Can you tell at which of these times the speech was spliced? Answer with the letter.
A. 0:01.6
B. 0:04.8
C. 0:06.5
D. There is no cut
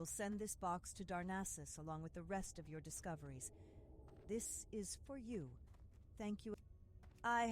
C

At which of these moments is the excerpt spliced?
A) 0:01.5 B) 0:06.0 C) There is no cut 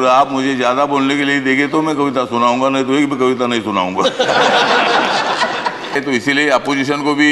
B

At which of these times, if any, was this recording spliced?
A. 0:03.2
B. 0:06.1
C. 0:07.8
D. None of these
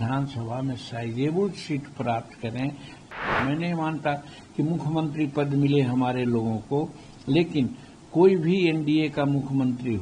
A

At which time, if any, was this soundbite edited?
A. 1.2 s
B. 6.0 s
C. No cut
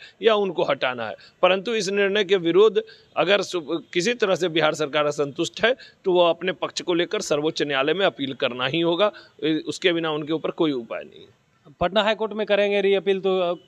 C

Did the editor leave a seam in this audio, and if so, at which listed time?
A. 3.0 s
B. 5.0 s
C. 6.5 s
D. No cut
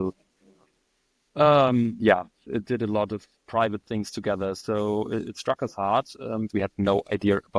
C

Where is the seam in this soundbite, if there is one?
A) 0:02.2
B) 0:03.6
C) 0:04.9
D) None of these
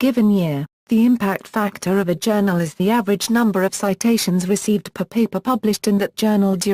C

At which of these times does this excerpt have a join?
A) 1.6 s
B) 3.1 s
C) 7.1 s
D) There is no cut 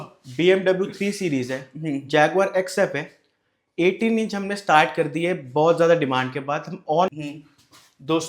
C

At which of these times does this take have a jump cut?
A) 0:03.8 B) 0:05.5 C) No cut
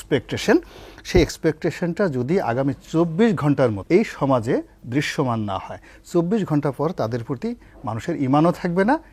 A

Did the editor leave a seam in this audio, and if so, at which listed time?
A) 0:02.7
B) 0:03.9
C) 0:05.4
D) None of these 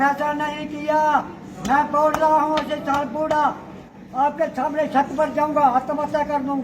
B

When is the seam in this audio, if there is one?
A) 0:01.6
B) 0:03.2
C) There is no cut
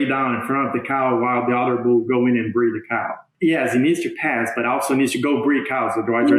B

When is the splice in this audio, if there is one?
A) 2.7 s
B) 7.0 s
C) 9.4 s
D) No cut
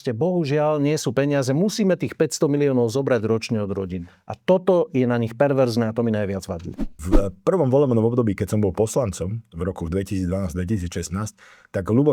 B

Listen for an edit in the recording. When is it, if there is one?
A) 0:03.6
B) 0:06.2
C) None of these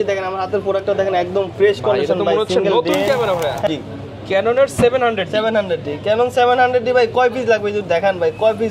A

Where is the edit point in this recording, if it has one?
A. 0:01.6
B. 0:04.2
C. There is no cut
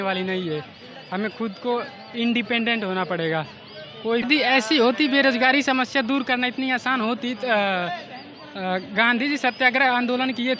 B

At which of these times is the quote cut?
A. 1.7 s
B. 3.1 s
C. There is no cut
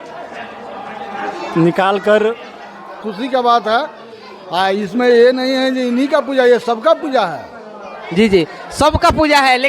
B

